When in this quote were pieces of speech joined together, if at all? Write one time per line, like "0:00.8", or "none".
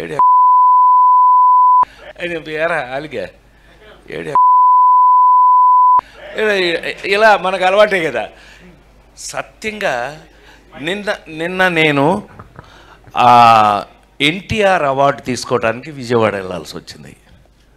0:01.9